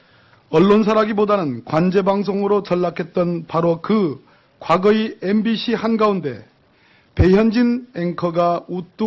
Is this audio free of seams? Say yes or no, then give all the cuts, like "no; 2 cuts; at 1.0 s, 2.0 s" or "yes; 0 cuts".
no; 1 cut; at 5.4 s